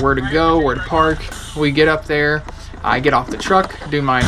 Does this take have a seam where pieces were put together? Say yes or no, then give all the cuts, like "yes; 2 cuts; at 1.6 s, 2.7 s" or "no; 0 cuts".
yes; 1 cut; at 1.4 s